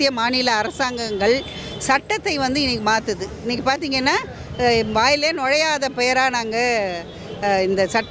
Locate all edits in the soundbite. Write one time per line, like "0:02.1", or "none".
none